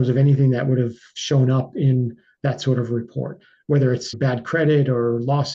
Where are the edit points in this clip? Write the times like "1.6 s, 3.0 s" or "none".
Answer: 4.1 s